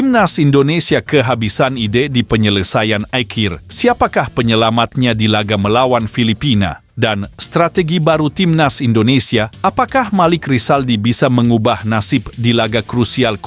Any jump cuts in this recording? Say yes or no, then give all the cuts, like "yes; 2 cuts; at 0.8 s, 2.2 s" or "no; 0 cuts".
no; 0 cuts